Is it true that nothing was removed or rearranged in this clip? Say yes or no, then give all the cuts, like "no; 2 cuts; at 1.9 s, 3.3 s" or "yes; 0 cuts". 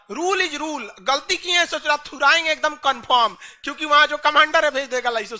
yes; 0 cuts